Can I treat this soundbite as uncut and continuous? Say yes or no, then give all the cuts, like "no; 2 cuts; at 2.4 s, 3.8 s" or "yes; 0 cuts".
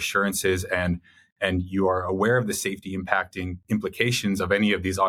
yes; 0 cuts